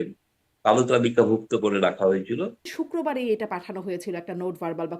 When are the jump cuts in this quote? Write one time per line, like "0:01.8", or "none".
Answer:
0:02.8

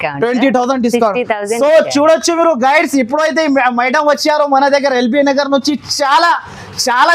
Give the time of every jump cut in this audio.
none

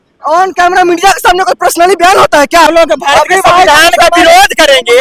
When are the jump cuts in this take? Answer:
0:02.7

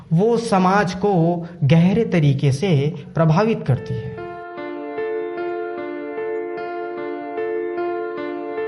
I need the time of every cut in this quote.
none

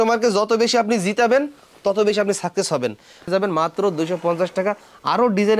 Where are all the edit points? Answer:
0:03.3

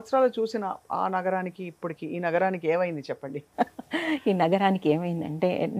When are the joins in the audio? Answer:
none

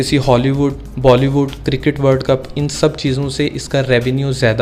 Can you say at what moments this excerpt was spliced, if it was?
none

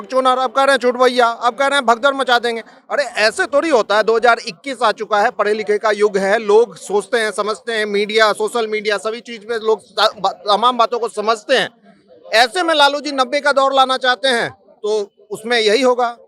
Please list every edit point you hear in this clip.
none

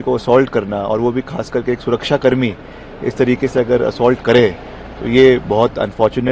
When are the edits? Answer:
none

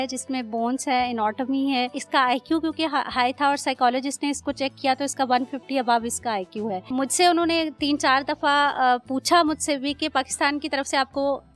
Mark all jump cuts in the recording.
0:02.0
0:06.9

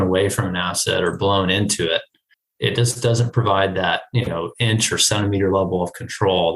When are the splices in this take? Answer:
none

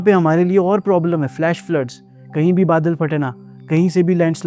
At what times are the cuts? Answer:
none

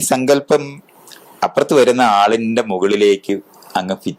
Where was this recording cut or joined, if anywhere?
none

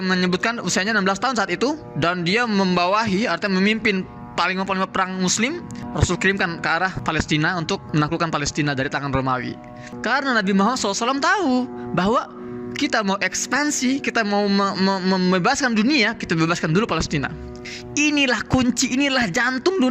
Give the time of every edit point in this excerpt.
none

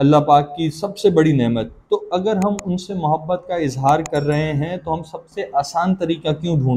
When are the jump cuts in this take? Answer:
none

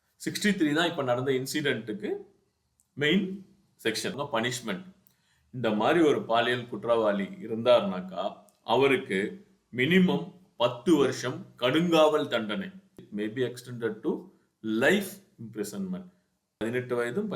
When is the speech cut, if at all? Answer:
0:04.2
0:13.0
0:16.1

